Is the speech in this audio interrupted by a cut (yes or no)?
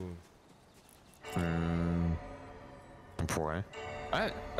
no